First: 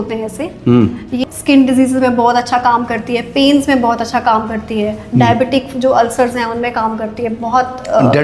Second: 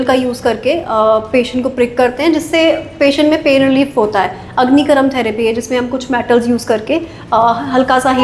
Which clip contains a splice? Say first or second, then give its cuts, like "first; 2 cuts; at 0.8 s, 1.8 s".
first; 1 cut; at 1.2 s